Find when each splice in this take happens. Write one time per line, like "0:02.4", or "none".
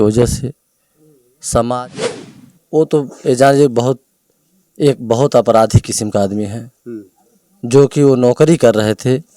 0:02.0